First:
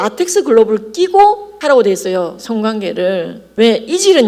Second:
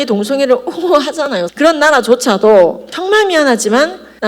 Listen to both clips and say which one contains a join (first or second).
second